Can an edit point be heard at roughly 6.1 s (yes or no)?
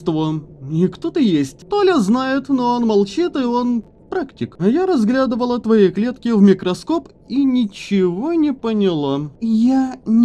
no